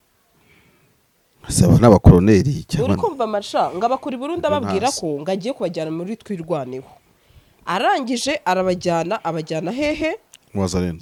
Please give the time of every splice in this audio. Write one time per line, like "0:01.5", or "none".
none

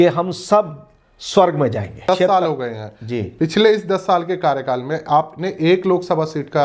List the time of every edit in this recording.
0:01.9

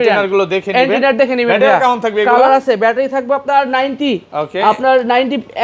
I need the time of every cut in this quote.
none

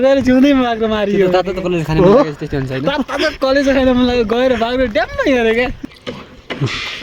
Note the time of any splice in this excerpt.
0:05.8

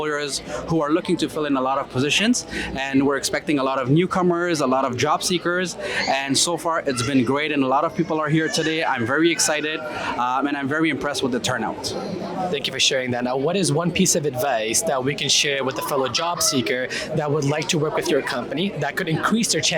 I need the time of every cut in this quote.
none

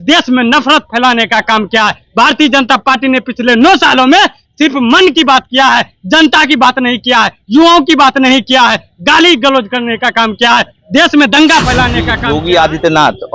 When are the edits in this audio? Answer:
0:12.2

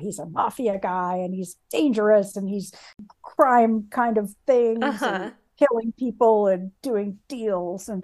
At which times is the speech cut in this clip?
0:03.2

